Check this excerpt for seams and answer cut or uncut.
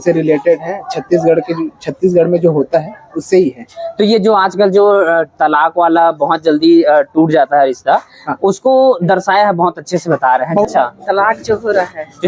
cut